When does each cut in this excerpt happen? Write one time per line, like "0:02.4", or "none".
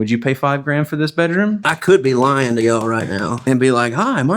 0:01.7